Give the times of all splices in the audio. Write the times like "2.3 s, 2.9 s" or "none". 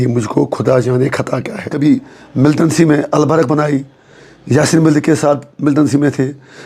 1.6 s